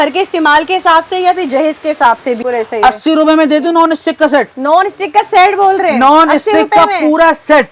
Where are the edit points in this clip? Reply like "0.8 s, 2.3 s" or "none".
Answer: 2.4 s